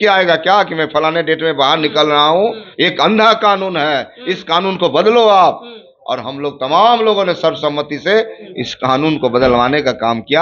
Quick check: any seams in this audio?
no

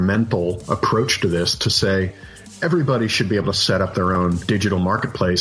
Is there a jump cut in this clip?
yes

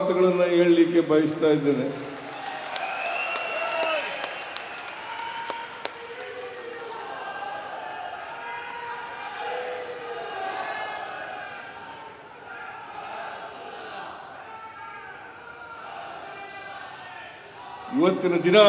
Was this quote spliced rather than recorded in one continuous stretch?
no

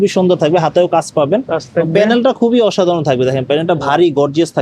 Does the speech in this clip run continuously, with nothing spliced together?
yes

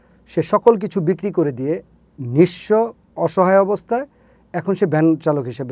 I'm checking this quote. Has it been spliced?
no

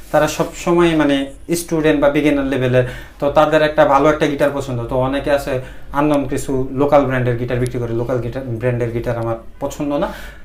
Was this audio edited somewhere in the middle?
no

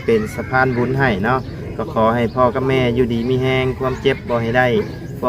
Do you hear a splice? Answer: no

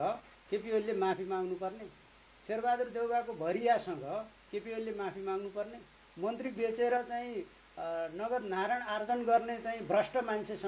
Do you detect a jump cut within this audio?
no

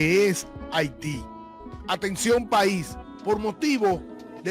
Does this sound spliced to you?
yes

